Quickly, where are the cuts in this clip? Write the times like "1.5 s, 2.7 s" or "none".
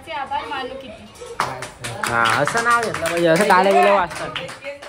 none